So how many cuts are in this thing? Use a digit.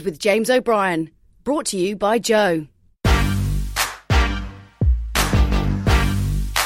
1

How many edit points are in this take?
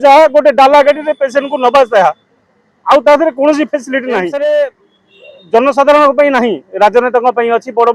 1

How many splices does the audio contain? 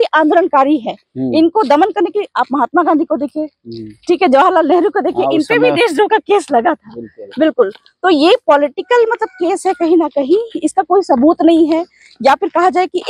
0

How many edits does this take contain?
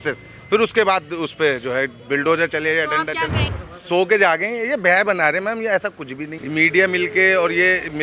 2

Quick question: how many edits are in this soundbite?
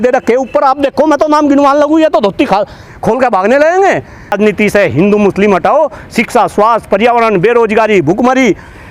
1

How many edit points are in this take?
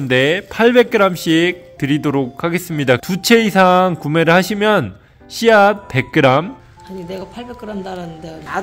1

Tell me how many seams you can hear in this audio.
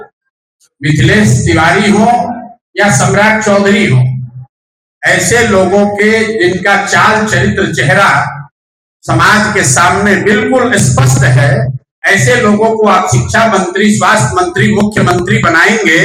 0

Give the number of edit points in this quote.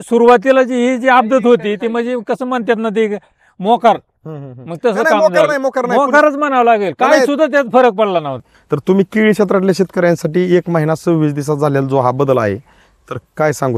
1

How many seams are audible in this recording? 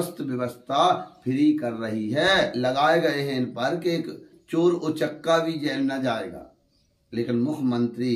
1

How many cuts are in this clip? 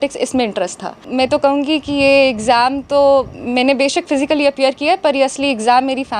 1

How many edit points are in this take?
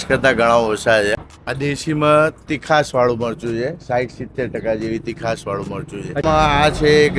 2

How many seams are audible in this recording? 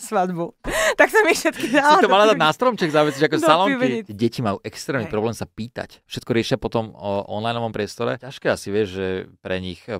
3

